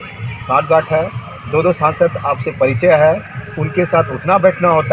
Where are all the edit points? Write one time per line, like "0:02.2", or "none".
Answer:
none